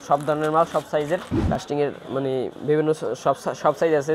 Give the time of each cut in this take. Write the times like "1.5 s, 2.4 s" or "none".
1.3 s